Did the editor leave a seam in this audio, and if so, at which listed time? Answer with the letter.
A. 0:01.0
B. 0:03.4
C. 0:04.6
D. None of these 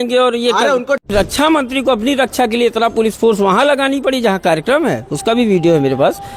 A